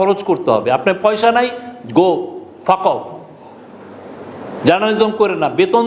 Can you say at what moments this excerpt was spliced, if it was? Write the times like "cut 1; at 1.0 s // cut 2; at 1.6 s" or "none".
none